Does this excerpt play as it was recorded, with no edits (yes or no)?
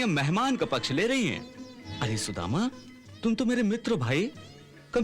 no